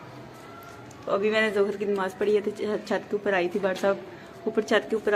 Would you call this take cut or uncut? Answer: uncut